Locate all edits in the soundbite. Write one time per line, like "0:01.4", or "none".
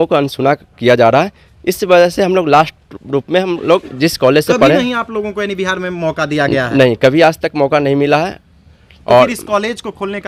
none